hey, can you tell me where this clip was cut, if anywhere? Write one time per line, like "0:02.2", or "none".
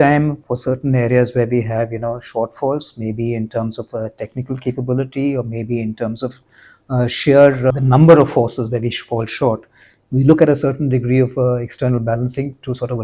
0:07.7